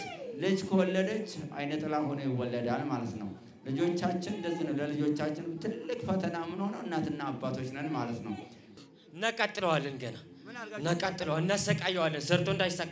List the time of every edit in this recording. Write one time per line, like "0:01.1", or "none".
0:08.6

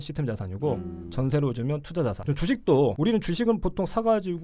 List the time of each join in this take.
0:02.2

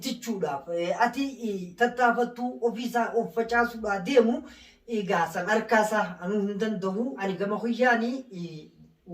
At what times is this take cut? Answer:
0:07.2

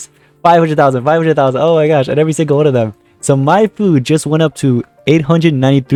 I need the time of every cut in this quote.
none

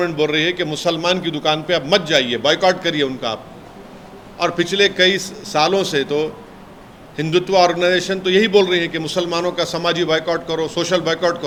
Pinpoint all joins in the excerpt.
none

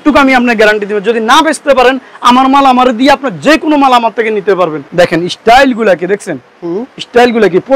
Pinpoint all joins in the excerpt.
0:04.8

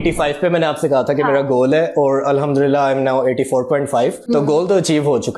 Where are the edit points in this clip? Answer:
0:04.2

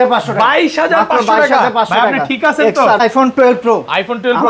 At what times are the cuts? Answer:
0:03.0

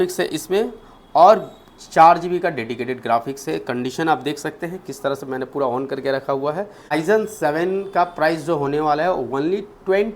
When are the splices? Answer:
0:06.9

